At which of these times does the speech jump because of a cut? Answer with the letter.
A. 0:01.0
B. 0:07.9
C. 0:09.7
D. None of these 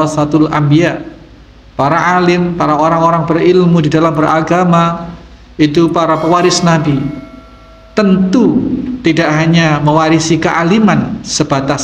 D